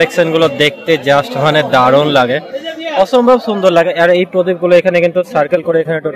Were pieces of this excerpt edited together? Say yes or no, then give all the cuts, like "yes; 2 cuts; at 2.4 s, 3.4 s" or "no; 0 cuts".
no; 0 cuts